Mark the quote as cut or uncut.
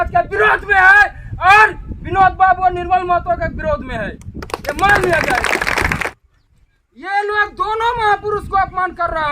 cut